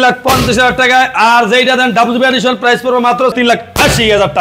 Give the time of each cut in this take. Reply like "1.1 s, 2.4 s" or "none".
3.3 s